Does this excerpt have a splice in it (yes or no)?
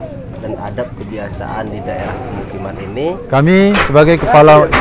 yes